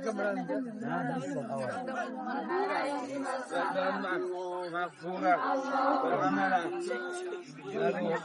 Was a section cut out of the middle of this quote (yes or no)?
no